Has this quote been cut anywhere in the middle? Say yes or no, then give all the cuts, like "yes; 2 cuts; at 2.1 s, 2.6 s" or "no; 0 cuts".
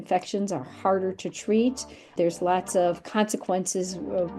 yes; 1 cut; at 2.1 s